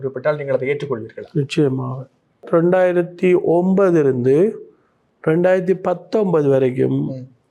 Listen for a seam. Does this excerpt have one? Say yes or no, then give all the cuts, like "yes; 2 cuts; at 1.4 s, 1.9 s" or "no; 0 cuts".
yes; 1 cut; at 2.4 s